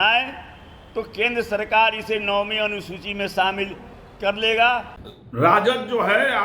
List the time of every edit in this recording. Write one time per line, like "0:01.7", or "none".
0:04.9

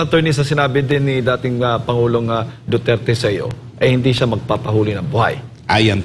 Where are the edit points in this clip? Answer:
none

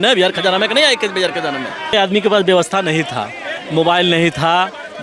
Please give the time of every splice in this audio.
0:01.9

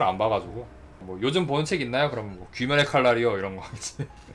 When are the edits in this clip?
0:01.1

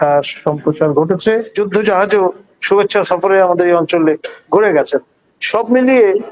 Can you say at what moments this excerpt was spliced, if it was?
0:01.5

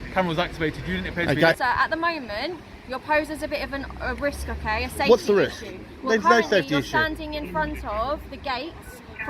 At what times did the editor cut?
0:01.6

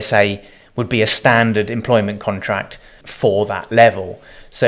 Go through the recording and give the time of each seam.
0:03.0

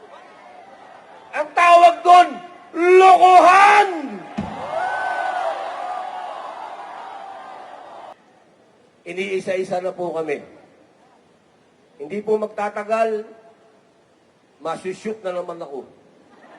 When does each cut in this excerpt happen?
0:08.1

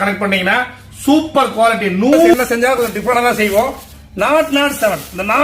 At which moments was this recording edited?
0:02.3

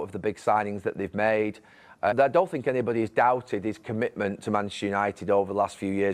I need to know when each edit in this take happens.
0:02.1

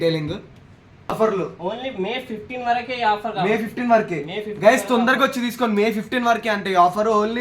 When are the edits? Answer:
0:01.1

